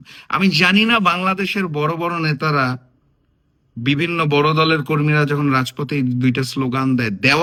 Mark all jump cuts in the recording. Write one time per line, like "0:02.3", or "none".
none